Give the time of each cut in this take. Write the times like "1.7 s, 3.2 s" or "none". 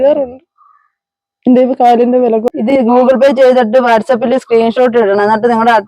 2.5 s